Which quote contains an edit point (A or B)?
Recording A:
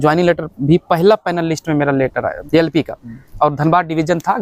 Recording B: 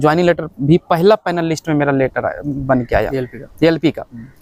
A